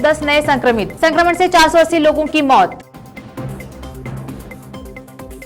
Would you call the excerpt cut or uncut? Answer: uncut